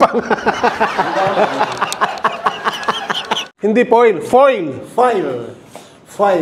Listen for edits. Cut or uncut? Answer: cut